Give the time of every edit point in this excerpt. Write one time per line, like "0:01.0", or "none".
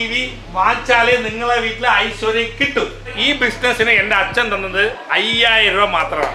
0:03.1